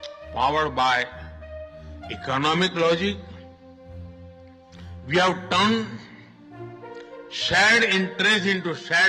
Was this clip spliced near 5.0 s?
yes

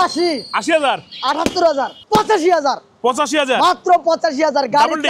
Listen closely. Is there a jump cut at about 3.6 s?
no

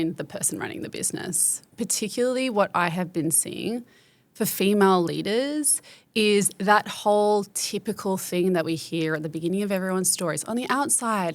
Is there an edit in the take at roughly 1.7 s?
yes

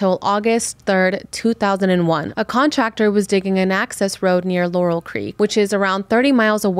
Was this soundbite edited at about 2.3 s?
yes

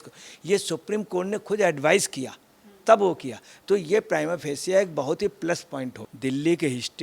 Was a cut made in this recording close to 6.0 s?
yes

